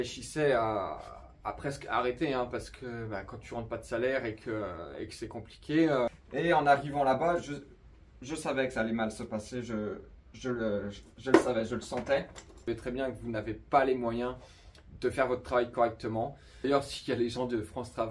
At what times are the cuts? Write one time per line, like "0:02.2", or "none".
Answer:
0:06.1
0:12.7
0:16.6